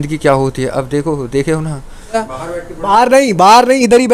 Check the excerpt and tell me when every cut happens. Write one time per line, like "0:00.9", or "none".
0:02.2